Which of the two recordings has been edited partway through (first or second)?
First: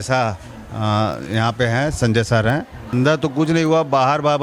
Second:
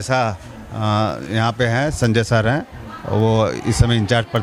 first